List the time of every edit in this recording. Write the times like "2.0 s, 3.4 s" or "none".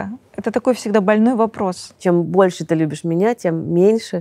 2.0 s